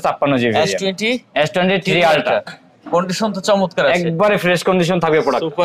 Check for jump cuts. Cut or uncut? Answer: uncut